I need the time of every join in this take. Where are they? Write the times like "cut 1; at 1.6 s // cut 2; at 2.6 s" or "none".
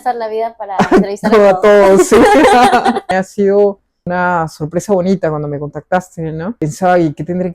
cut 1; at 3.1 s // cut 2; at 4.0 s // cut 3; at 6.6 s